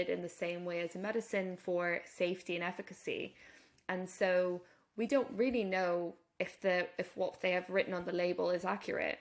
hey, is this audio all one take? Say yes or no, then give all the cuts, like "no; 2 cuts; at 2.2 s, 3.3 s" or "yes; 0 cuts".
yes; 0 cuts